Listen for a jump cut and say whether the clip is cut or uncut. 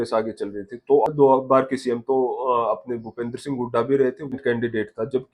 cut